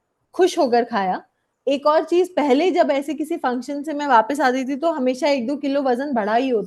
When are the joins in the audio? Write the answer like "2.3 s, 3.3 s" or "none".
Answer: 1.5 s